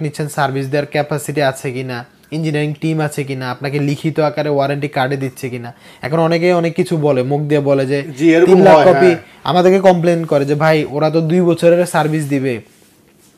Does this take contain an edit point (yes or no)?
no